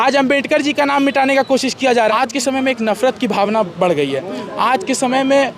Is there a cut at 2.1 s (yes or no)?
yes